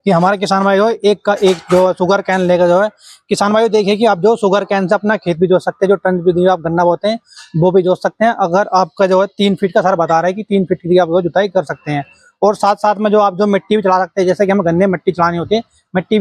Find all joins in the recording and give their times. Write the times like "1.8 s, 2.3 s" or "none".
none